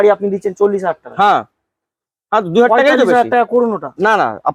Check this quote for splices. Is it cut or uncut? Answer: uncut